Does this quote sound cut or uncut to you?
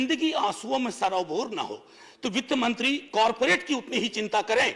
uncut